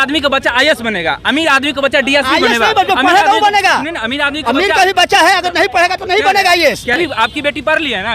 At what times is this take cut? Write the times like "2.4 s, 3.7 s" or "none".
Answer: 7.0 s